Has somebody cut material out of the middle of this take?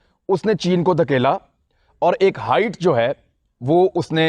no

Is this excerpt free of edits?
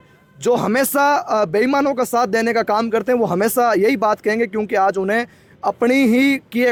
yes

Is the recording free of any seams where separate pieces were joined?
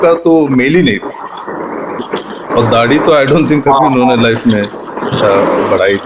no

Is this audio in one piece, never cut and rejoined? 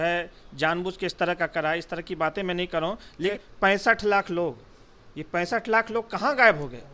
no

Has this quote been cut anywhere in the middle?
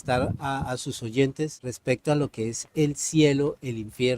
yes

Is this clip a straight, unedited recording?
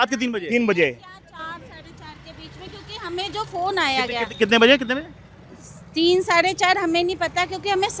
yes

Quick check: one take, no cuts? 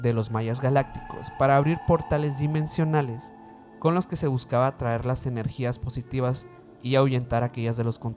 yes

